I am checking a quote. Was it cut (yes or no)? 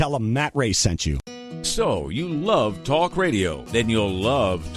yes